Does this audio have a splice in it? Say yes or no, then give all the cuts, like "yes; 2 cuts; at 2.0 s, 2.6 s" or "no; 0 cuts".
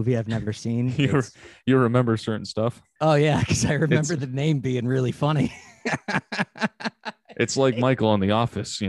yes; 1 cut; at 2.8 s